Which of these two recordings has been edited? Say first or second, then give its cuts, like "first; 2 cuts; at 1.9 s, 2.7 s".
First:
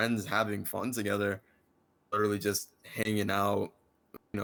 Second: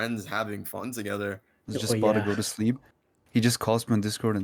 second; 1 cut; at 1.5 s